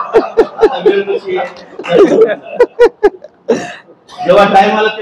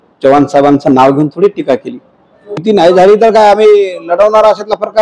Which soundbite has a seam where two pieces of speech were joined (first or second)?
second